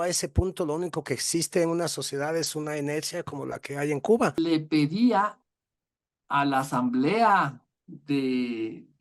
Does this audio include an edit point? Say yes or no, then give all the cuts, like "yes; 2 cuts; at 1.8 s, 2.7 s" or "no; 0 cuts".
yes; 1 cut; at 4.4 s